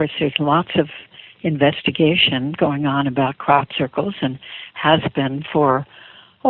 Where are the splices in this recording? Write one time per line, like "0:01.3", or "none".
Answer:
0:04.2

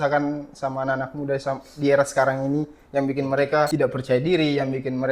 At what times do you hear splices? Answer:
0:03.7

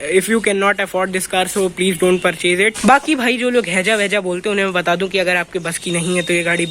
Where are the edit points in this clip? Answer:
0:02.8

